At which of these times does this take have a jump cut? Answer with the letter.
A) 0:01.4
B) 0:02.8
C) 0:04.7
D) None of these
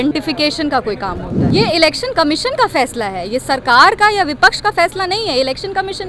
A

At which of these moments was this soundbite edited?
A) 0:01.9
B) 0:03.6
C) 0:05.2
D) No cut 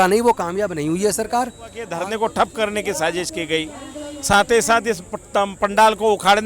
A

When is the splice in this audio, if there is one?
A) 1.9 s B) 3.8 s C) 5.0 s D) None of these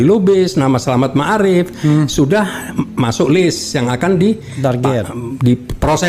D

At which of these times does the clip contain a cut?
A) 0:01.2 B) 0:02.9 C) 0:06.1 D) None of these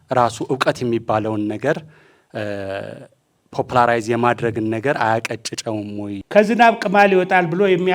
C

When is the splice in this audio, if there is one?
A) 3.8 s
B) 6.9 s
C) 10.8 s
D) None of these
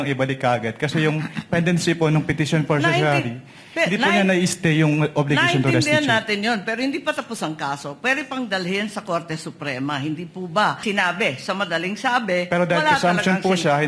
C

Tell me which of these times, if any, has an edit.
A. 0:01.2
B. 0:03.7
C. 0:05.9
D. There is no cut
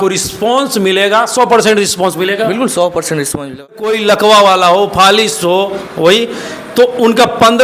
B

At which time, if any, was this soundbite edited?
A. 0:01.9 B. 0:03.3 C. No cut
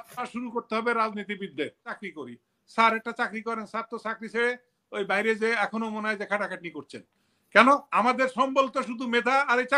A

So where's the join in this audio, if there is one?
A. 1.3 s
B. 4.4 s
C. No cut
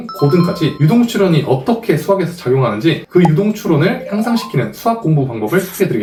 C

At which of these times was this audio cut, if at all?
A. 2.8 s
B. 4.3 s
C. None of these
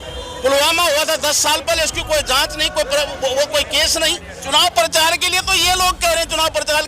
B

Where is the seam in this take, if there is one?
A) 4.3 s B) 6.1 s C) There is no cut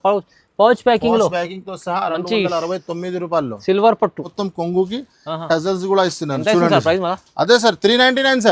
A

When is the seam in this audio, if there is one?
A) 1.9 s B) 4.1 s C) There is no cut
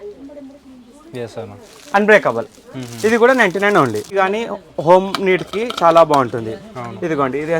B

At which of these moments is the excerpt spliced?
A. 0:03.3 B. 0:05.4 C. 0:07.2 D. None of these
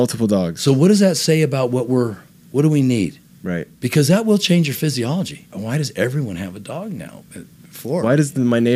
B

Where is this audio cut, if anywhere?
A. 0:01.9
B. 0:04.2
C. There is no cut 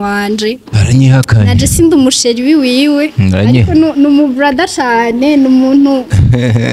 C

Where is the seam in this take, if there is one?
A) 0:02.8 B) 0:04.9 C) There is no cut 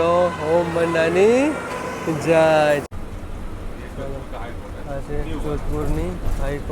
A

